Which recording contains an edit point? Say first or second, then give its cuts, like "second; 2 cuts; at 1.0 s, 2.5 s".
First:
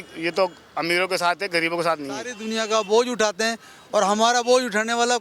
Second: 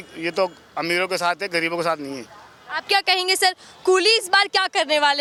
first; 1 cut; at 2.4 s